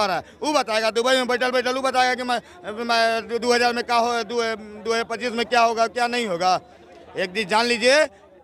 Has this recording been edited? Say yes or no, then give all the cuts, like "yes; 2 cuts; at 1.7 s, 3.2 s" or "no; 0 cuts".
no; 0 cuts